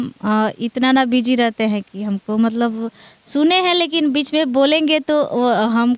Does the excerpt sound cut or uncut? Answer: uncut